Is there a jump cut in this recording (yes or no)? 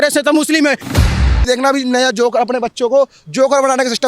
yes